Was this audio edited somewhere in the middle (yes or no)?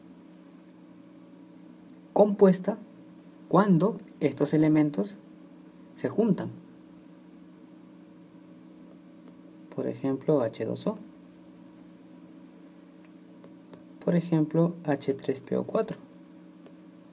yes